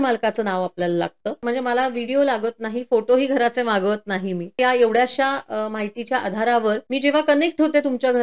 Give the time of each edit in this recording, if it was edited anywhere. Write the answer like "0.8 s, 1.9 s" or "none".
1.4 s, 4.6 s, 6.8 s